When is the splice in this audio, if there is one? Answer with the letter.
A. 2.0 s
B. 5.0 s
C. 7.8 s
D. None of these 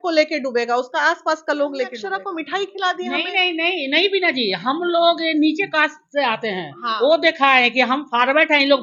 A